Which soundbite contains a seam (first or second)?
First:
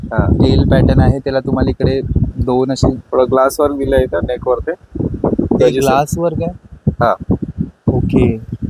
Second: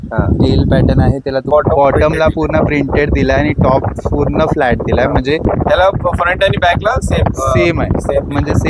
second